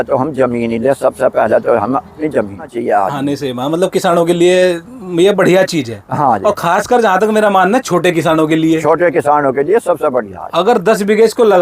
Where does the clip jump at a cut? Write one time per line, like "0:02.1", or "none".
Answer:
0:02.7

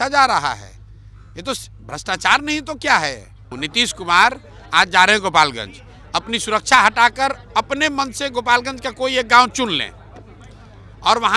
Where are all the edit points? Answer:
0:03.6

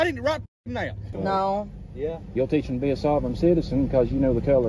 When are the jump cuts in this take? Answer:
0:01.1

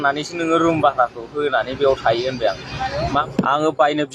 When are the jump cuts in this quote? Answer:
0:03.2

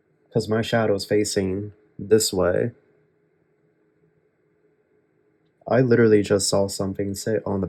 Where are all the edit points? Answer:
none

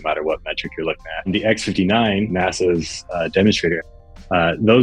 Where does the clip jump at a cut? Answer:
0:01.3
0:02.3
0:03.8

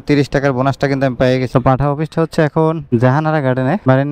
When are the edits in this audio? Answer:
0:01.5

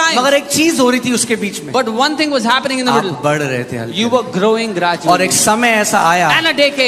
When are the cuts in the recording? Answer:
none

